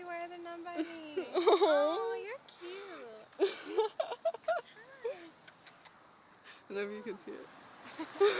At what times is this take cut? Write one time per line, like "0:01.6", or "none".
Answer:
none